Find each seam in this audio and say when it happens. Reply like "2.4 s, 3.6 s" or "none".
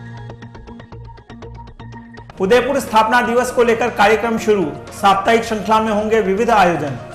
none